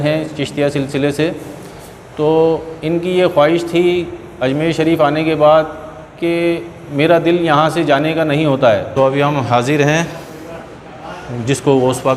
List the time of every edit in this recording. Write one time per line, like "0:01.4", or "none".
0:08.9